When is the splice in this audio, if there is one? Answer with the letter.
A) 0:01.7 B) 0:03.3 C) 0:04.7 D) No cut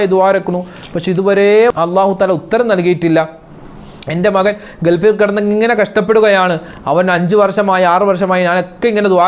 A